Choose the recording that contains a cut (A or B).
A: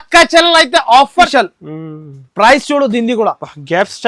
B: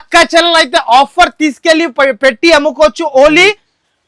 A